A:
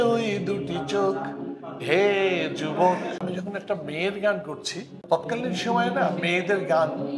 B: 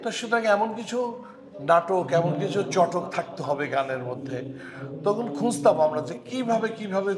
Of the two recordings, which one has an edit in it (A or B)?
A